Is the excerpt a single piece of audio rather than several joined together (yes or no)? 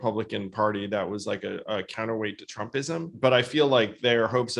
no